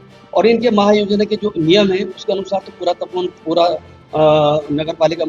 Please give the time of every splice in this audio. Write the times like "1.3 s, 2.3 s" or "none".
none

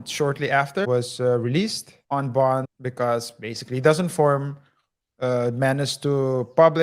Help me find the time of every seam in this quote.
0.9 s, 1.9 s, 2.8 s

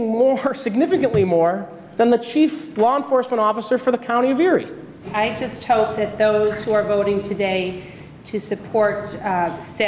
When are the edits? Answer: 5.0 s

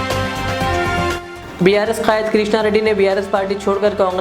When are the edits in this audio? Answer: none

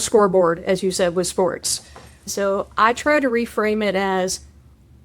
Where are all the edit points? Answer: 2.3 s

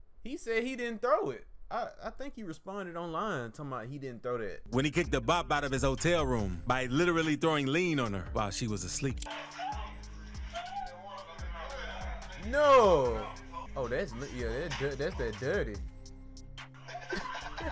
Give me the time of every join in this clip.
4.6 s, 13.6 s

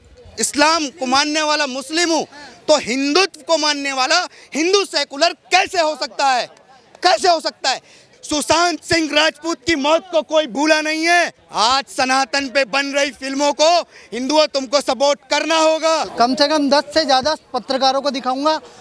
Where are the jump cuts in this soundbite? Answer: 8.1 s, 11.4 s, 16.1 s

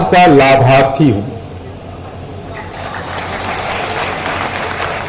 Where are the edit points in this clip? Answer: none

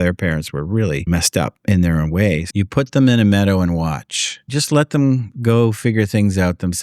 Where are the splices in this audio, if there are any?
1.1 s, 2.4 s, 4.5 s

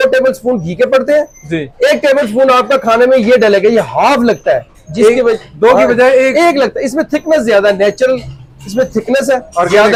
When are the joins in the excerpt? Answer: none

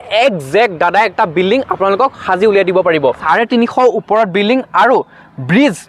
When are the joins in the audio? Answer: 3.2 s

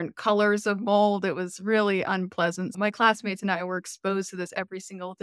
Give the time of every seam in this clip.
2.7 s

